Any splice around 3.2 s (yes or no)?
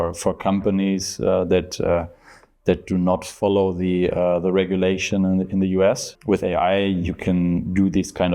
no